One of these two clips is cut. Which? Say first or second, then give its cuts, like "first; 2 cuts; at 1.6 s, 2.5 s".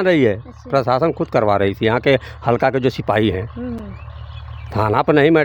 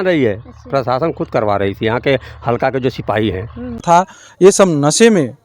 second; 1 cut; at 3.8 s